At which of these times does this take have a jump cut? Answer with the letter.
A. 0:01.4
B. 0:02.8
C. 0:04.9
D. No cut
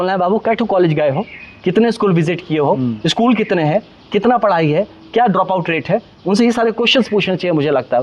D